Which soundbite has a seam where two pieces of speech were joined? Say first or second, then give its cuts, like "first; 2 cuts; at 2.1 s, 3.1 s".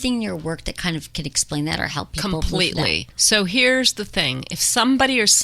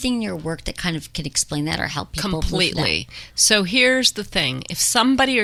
first; 1 cut; at 3.1 s